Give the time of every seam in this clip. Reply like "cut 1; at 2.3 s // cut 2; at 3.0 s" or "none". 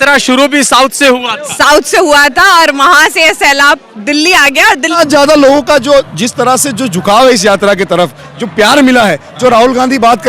cut 1; at 4.9 s